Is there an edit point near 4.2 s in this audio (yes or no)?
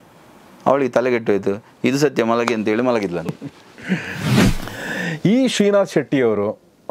yes